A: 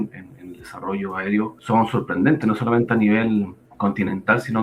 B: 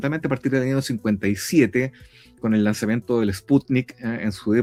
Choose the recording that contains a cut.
A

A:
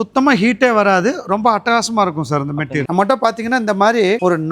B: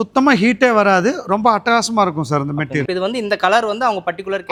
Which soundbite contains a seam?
A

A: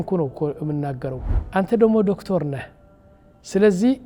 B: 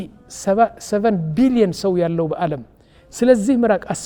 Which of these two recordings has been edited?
A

